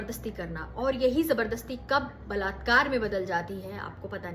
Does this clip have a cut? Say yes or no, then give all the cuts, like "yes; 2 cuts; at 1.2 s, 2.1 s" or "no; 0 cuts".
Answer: no; 0 cuts